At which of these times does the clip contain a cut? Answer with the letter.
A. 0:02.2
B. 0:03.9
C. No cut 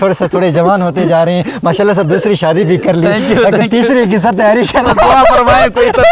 C